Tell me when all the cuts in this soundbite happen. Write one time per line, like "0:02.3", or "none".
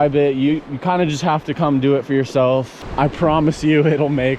0:02.8